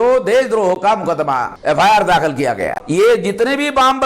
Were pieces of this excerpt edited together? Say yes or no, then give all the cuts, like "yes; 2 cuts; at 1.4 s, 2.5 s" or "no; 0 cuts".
yes; 2 cuts; at 1.5 s, 2.8 s